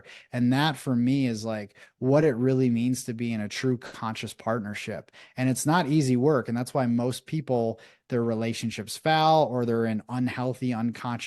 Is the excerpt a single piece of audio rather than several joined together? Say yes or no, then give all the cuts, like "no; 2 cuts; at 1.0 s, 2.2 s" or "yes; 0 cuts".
yes; 0 cuts